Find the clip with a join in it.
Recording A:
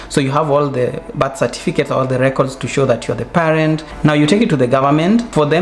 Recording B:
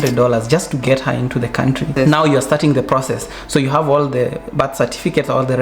B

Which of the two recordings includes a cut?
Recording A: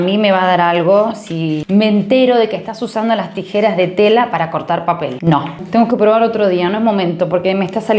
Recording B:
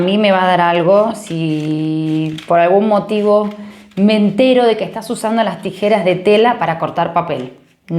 A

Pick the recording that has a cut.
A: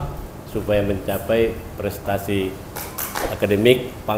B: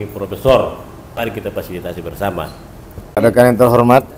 B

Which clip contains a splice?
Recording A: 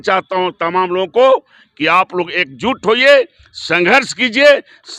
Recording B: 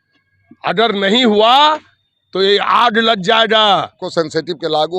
B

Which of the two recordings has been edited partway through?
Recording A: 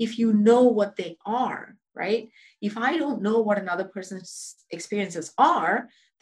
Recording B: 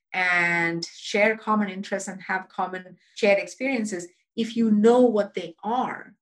B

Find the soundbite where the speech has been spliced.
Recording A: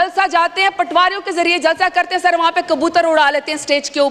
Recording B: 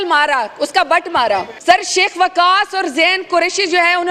B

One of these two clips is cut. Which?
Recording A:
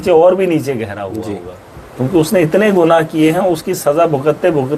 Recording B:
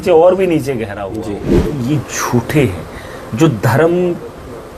B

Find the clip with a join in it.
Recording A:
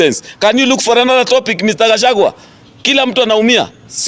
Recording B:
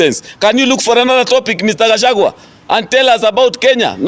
A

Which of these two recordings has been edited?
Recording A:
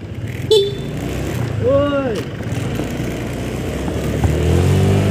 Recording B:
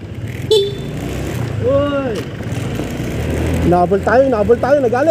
B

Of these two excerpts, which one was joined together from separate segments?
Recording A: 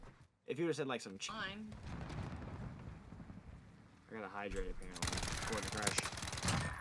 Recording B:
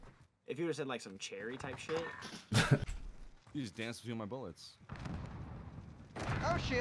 A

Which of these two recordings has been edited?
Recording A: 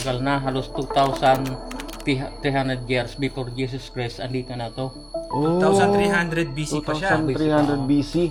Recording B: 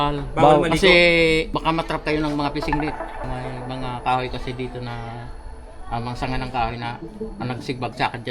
B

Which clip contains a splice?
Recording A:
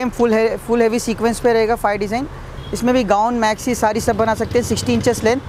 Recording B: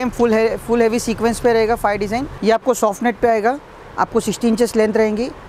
B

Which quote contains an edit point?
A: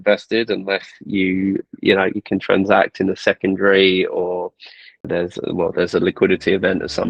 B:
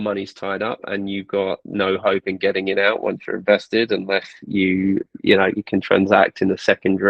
A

